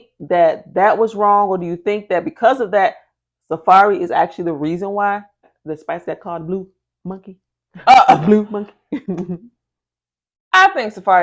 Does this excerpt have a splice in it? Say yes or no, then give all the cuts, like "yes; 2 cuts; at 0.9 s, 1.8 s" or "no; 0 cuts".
yes; 1 cut; at 5.5 s